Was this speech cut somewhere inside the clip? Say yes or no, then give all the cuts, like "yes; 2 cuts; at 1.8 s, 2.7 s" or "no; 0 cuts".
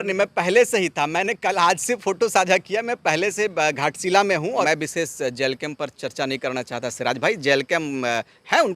yes; 1 cut; at 4.7 s